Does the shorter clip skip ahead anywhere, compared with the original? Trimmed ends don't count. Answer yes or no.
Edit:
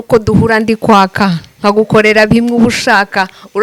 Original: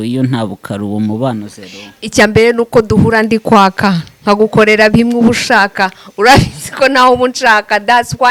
no